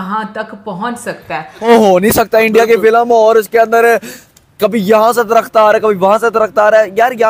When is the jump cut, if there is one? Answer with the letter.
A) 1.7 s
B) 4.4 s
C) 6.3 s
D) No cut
A